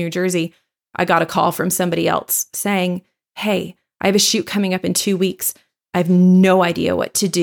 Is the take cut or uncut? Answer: uncut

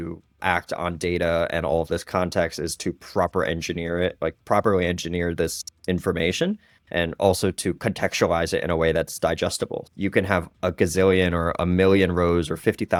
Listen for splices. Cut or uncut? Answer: uncut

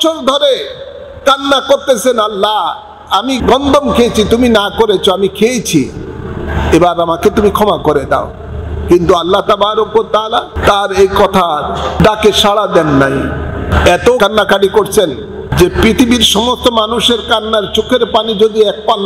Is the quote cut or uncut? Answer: cut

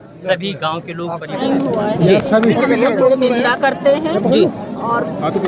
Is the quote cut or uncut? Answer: cut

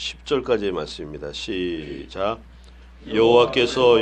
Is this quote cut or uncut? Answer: uncut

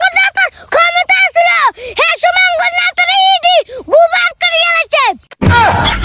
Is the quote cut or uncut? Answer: uncut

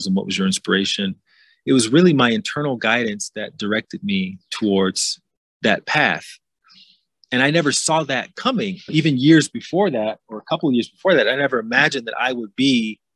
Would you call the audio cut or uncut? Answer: cut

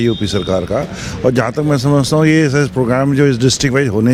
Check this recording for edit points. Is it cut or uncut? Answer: uncut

